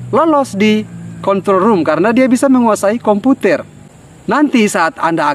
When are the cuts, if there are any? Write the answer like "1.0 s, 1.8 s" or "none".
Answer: 4.0 s